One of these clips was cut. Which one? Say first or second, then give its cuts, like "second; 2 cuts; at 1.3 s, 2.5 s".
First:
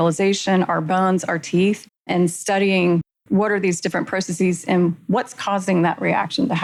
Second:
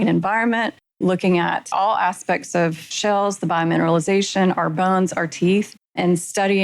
second; 2 cuts; at 1.7 s, 2.9 s